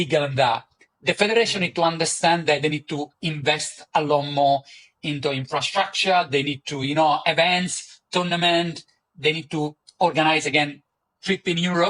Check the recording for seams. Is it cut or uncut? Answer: uncut